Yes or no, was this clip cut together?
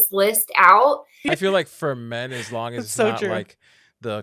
yes